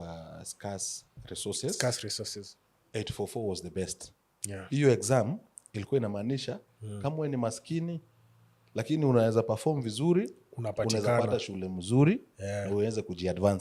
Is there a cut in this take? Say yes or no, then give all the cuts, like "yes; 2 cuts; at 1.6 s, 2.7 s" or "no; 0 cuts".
no; 0 cuts